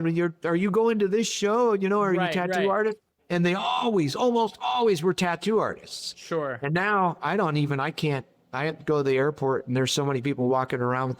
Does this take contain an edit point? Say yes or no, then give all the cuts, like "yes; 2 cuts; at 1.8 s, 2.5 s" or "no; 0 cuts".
no; 0 cuts